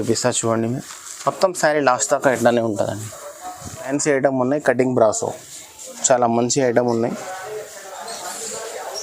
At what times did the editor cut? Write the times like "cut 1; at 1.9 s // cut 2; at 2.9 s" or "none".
cut 1; at 3.9 s